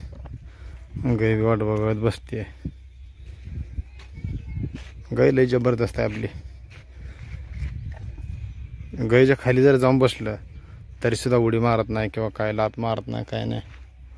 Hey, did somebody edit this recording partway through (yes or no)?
no